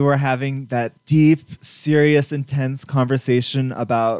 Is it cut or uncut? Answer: uncut